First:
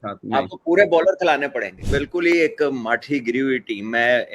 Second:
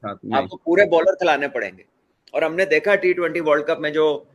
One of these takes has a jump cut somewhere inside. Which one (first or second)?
first